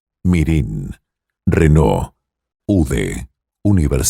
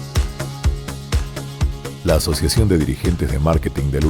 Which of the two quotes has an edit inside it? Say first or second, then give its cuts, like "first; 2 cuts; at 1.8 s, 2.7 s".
second; 1 cut; at 1.6 s